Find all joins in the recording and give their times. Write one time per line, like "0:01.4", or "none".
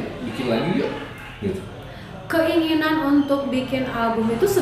none